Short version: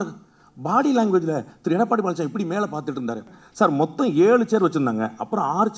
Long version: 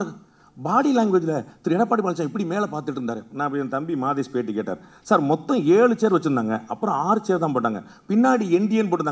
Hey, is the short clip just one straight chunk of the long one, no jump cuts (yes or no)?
no